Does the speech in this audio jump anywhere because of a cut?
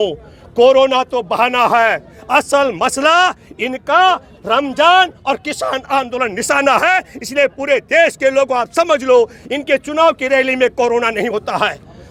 no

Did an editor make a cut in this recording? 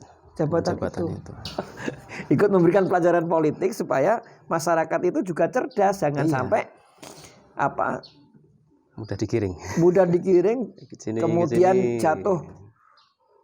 yes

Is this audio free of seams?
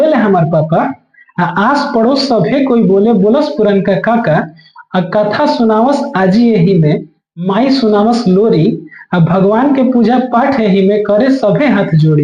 yes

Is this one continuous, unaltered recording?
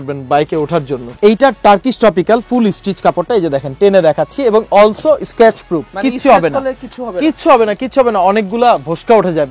no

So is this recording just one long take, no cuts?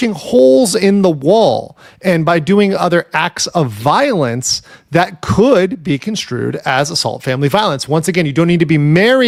yes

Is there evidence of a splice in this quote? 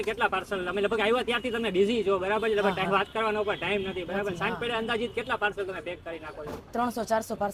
no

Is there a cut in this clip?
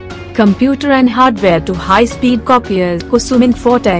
yes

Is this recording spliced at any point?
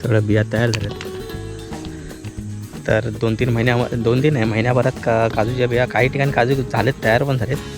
no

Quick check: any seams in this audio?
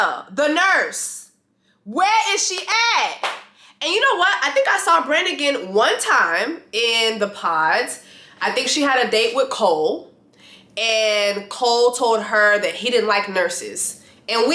no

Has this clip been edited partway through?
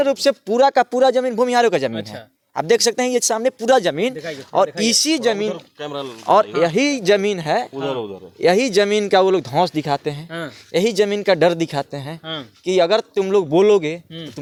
no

